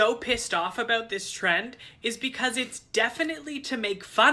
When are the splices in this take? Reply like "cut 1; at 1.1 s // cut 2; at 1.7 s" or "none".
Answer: none